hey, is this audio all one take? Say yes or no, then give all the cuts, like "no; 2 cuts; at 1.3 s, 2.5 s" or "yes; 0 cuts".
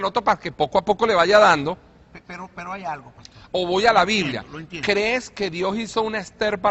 yes; 0 cuts